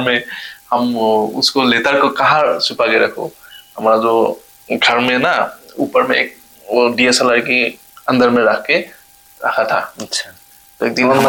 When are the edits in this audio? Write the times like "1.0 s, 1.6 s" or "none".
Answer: none